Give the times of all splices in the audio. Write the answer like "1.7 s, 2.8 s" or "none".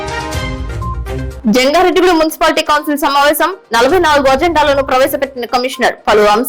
1.2 s